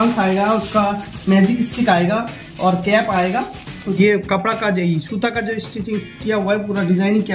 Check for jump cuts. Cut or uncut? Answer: cut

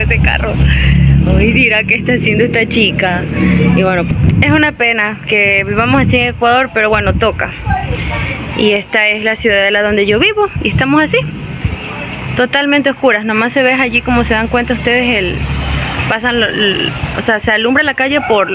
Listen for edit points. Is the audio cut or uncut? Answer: uncut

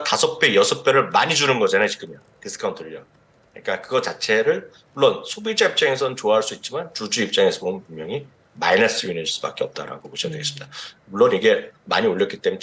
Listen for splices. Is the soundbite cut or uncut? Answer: uncut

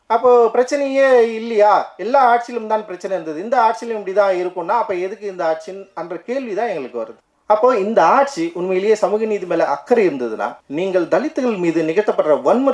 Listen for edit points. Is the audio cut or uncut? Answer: cut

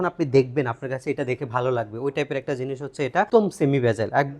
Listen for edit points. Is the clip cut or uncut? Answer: cut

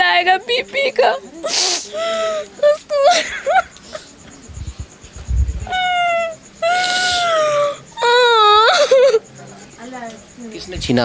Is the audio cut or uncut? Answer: uncut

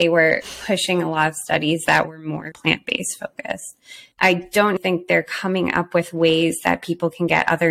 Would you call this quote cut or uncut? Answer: cut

